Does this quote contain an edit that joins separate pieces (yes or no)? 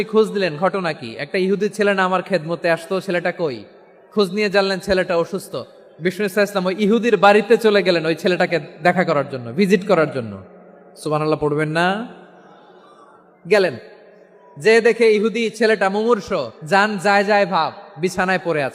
yes